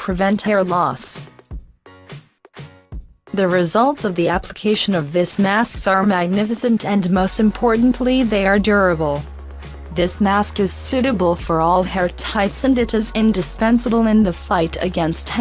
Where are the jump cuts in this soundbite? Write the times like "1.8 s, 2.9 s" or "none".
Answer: 14.0 s